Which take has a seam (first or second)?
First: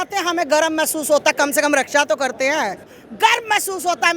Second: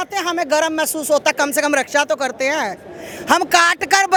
first